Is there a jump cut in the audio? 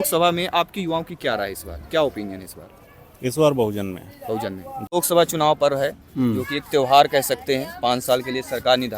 yes; 1 cut; at 5.0 s

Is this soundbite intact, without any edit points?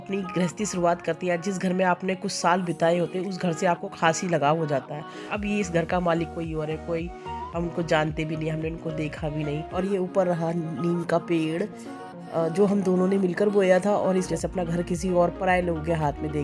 no; 3 cuts; at 5.3 s, 9.7 s, 14.3 s

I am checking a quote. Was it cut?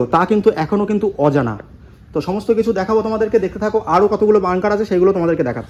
no; 0 cuts

